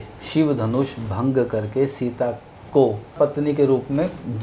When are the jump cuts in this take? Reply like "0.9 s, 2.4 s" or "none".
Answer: 3.1 s